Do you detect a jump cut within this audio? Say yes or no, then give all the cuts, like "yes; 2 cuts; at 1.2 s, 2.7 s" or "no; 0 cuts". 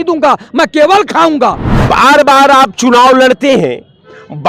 yes; 1 cut; at 1.6 s